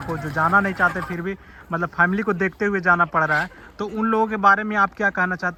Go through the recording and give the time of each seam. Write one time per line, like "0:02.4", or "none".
none